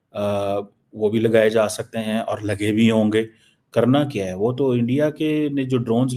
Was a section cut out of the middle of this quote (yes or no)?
no